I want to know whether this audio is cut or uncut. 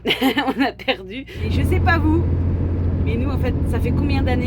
cut